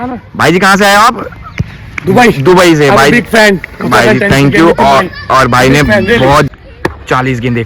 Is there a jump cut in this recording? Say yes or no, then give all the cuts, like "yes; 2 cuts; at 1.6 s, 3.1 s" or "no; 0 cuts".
yes; 1 cut; at 6.5 s